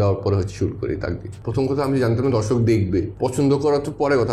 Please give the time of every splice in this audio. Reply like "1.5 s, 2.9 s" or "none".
1.4 s, 3.1 s